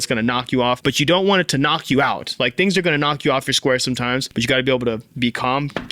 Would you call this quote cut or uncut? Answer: cut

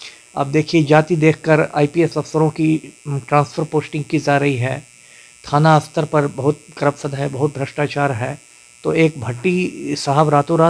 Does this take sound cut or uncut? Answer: uncut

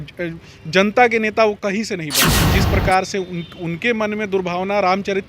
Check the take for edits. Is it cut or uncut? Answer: cut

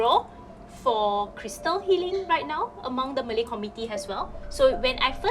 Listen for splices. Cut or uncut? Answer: cut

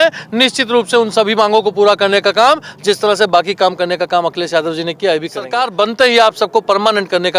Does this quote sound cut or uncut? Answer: cut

